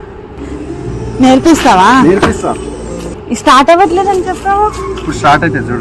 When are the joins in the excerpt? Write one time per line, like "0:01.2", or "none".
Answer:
none